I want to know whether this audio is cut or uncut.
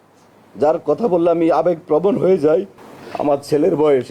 cut